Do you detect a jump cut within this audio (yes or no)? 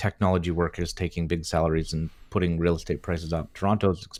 no